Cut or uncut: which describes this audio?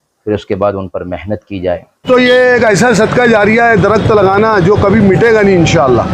cut